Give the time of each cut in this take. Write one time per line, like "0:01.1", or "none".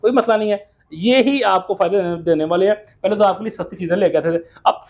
none